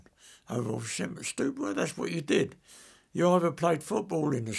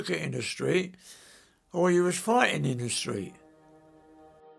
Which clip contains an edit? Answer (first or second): second